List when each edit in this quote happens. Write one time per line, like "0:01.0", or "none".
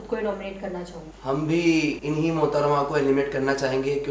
0:01.0
0:02.0